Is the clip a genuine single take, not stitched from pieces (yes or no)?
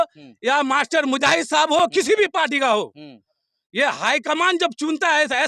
yes